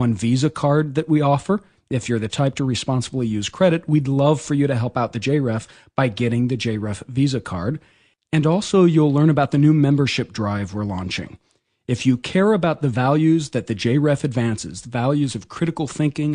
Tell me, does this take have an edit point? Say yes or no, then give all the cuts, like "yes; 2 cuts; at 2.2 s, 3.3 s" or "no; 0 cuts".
no; 0 cuts